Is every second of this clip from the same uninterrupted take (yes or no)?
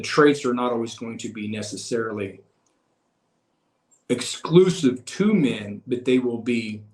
yes